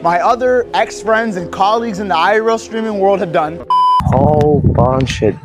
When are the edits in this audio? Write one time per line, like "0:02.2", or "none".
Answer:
0:03.9